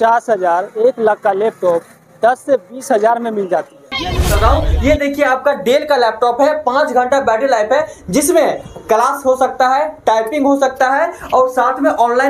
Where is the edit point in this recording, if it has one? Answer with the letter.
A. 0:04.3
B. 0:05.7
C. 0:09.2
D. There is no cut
A